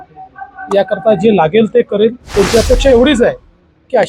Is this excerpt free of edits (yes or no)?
no